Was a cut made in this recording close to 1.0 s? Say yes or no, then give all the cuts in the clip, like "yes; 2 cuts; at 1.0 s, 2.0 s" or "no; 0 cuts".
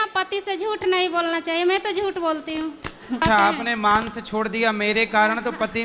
no; 1 cut; at 3.2 s